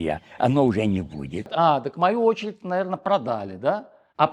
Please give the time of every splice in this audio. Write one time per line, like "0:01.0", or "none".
0:01.5